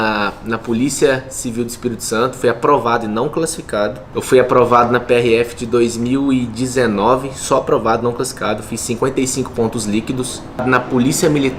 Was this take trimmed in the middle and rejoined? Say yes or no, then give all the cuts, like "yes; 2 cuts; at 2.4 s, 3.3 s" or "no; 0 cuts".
no; 0 cuts